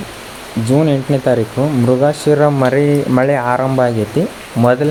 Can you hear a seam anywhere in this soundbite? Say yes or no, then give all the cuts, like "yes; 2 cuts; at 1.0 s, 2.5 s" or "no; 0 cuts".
no; 0 cuts